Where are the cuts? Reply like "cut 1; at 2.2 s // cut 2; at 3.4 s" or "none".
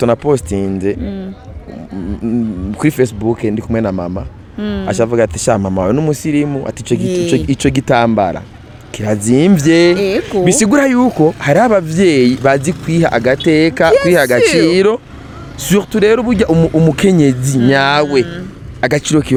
none